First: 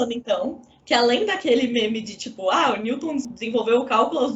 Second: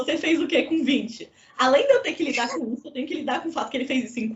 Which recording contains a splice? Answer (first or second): first